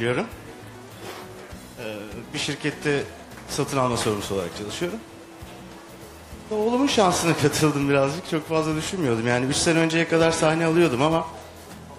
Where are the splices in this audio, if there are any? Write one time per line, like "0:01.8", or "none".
none